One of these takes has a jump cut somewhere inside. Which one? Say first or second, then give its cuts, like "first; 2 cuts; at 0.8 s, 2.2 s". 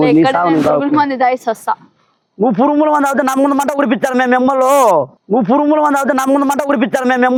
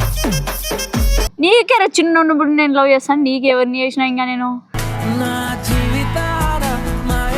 second; 1 cut; at 1.3 s